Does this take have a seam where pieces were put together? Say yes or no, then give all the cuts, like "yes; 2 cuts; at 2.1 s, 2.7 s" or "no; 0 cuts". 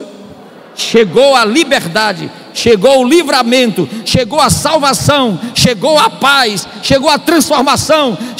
no; 0 cuts